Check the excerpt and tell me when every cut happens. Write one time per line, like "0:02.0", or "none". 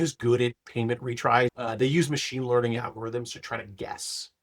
0:01.5